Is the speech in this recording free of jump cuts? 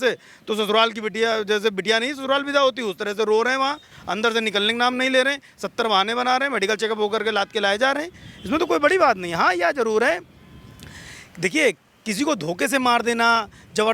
yes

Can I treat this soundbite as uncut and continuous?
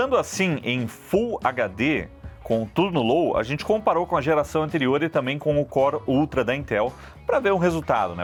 yes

